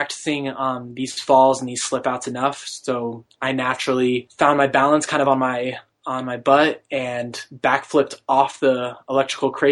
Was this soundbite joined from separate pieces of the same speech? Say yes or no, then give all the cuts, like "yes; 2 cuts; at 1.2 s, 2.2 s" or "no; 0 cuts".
yes; 1 cut; at 4.3 s